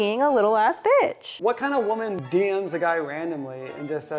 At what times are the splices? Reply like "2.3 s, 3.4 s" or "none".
1.3 s, 2.2 s